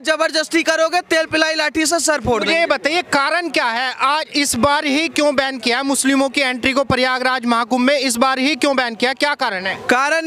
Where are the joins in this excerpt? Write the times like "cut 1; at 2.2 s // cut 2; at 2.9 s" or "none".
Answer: none